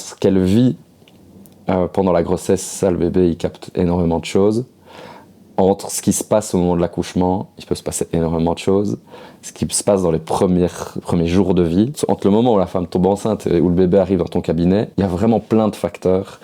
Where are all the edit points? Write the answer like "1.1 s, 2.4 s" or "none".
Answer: 12.0 s, 14.9 s